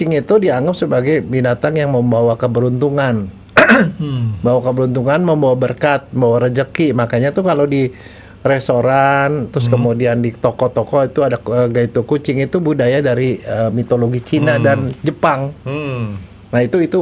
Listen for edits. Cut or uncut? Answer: uncut